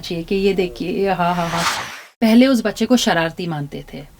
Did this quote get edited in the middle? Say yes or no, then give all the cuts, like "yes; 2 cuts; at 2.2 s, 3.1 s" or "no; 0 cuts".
yes; 1 cut; at 1.6 s